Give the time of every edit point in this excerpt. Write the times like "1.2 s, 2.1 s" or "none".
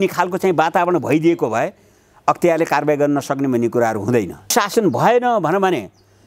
4.5 s